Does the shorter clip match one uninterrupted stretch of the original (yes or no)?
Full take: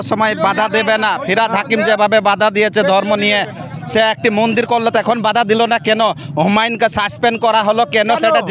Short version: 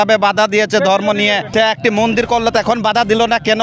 no